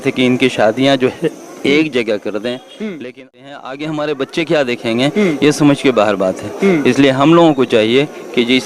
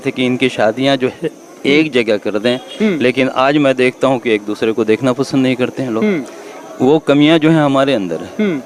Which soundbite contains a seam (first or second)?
first